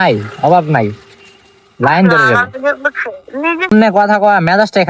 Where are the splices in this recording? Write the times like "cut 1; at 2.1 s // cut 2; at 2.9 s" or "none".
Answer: cut 1; at 3.7 s